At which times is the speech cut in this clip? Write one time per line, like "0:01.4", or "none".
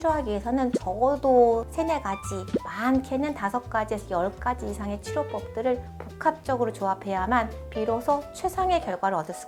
none